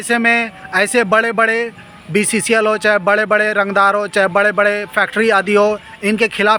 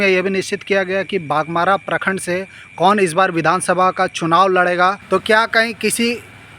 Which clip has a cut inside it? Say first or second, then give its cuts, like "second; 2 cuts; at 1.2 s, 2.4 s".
second; 1 cut; at 5.0 s